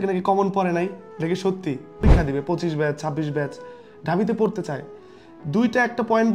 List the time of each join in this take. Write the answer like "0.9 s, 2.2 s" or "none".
2.0 s